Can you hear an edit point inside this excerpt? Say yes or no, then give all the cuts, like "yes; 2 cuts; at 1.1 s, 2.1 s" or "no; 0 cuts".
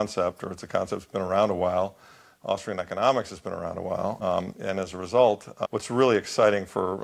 yes; 2 cuts; at 4.2 s, 5.5 s